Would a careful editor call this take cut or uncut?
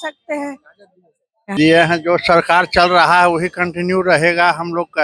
cut